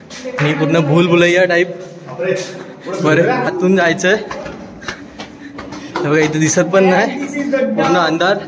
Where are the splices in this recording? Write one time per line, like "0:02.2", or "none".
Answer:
0:03.5